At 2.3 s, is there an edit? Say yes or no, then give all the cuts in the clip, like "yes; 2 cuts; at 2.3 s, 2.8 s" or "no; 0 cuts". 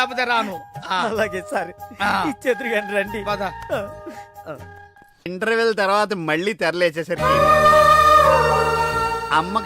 no; 1 cut; at 5.3 s